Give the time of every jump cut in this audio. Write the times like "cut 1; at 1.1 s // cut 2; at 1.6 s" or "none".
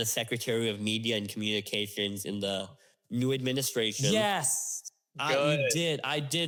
none

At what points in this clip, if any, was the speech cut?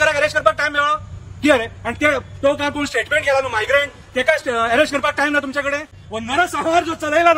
cut 1; at 6.0 s

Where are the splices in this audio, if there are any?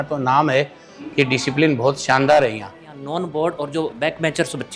cut 1; at 2.8 s // cut 2; at 4.0 s

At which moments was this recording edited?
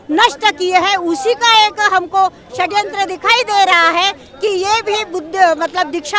none

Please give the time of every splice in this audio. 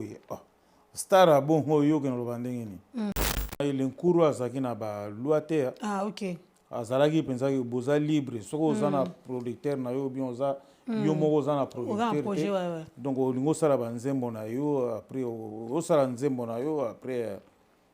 cut 1; at 3.5 s

